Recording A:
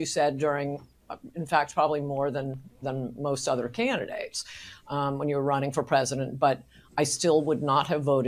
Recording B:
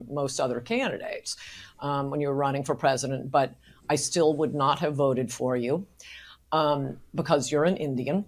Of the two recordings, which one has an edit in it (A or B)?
B